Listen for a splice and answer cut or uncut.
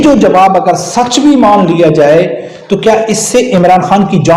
uncut